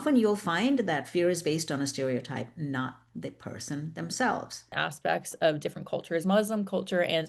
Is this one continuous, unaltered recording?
no; 1 cut; at 4.7 s

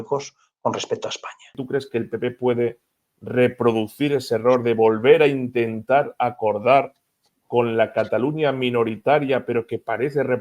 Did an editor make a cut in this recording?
yes; 1 cut; at 1.5 s

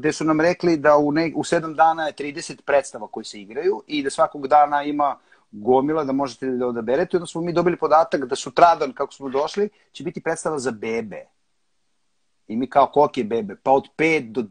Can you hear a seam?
no; 0 cuts

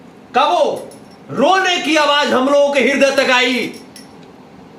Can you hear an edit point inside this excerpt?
no; 0 cuts

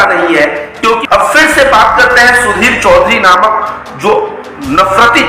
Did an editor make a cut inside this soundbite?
yes; 1 cut; at 1.0 s

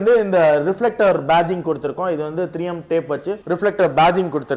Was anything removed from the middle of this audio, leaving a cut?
yes; 1 cut; at 3.4 s

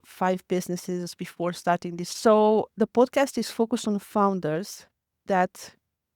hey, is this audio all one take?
no; 1 cut; at 2.1 s

